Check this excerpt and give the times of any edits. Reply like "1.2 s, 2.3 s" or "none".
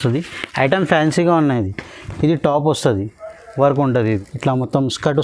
4.3 s